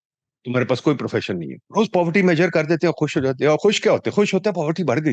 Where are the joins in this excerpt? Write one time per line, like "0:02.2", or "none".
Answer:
0:01.6